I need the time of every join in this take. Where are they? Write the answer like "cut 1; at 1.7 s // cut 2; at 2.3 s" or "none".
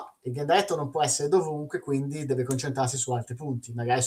none